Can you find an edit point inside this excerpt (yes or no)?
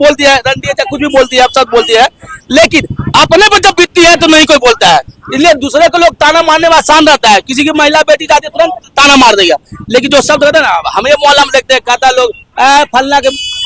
no